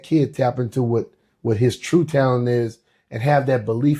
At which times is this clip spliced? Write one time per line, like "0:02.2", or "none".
none